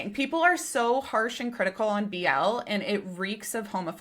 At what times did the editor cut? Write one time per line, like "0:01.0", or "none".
none